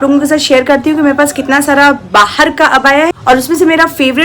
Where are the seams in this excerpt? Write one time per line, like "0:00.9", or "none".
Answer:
0:03.2